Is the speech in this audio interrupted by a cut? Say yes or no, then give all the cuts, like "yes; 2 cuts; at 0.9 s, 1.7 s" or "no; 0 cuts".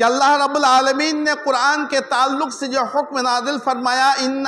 no; 0 cuts